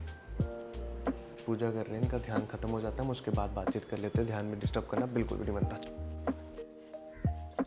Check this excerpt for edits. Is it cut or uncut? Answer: uncut